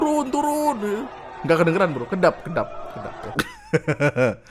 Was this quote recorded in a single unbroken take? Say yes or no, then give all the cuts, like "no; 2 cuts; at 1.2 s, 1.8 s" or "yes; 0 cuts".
no; 1 cut; at 3.2 s